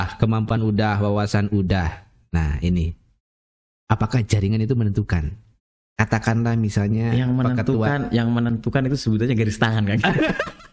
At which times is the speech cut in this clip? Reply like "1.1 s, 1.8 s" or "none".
none